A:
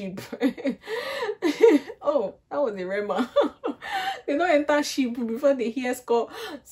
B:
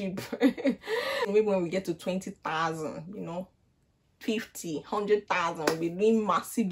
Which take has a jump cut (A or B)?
B